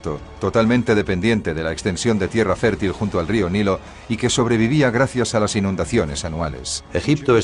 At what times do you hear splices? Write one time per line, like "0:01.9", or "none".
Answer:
none